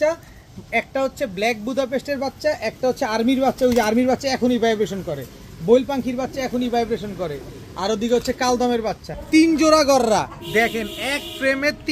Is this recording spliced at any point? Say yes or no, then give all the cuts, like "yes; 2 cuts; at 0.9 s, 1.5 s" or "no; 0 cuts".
yes; 1 cut; at 9.1 s